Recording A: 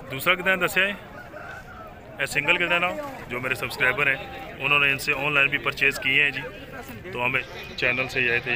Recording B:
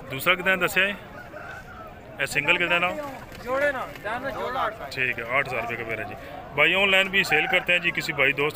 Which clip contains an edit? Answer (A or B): A